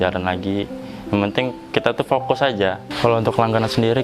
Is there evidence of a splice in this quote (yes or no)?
yes